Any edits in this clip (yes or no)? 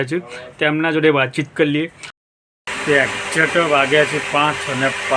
yes